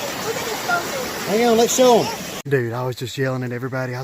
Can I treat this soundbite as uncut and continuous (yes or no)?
no